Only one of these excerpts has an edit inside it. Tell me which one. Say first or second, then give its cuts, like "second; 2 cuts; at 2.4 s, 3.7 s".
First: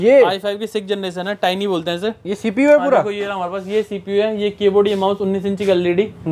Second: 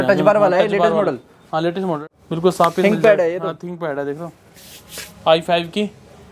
second; 1 cut; at 2.1 s